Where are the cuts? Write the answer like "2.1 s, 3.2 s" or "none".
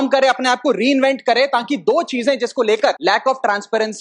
3.0 s

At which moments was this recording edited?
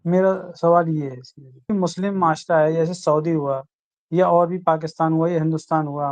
1.7 s

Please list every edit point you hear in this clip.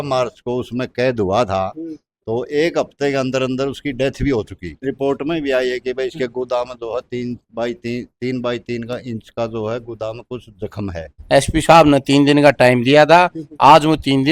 4.8 s, 11.1 s

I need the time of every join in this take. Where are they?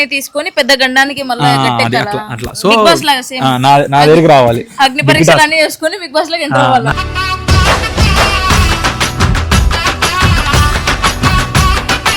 none

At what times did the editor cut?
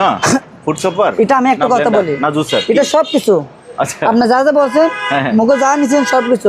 none

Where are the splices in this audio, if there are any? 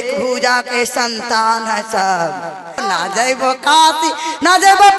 2.8 s

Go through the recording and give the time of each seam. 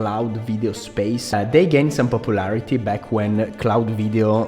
1.3 s

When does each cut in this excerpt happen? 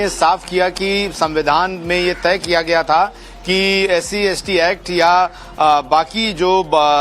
5.4 s

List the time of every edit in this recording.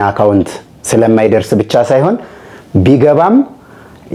none

